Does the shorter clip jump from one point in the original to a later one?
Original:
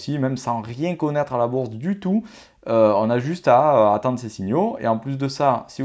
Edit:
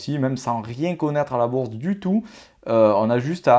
no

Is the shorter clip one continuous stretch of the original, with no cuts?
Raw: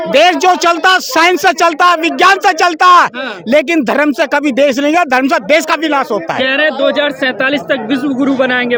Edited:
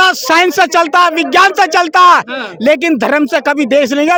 yes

